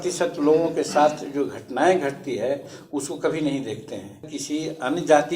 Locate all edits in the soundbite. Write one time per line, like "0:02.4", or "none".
0:04.3